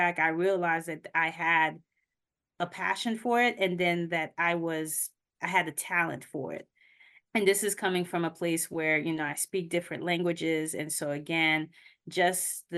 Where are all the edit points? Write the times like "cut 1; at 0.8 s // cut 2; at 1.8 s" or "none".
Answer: none